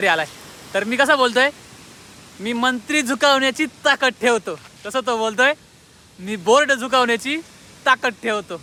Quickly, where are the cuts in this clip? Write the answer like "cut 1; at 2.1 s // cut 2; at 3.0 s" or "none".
none